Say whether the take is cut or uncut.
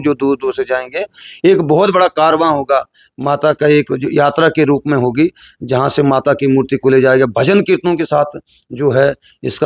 uncut